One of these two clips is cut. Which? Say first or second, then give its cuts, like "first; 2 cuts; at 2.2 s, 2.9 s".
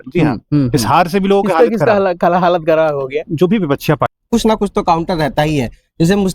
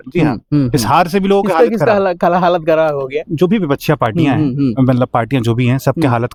first; 1 cut; at 4.1 s